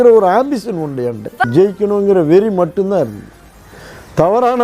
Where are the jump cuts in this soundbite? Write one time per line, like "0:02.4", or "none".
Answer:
0:01.5